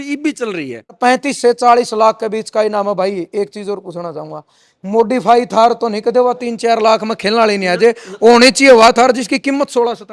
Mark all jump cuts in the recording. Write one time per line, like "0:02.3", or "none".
0:01.0